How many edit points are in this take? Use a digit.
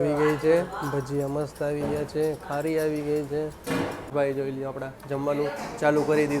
1